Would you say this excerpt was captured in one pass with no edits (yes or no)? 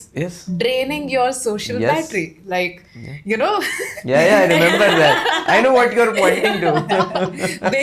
yes